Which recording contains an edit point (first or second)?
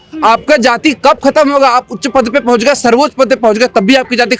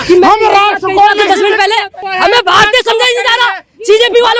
second